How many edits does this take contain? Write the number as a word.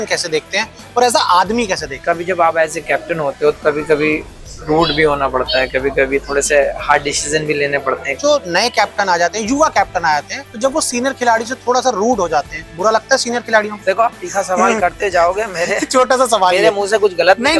five